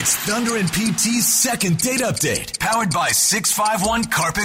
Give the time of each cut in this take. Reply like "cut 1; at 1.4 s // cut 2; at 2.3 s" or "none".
none